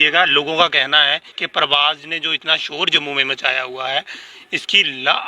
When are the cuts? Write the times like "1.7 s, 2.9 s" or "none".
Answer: 1.3 s